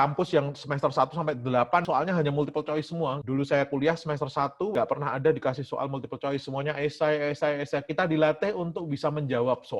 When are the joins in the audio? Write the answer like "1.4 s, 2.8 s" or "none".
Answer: none